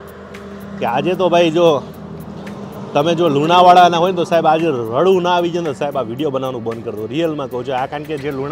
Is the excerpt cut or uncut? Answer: uncut